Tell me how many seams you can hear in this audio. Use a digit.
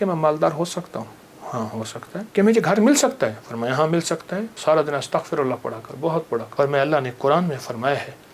3